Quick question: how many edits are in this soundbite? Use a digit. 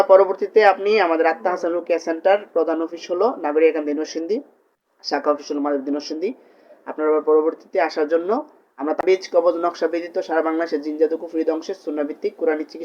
1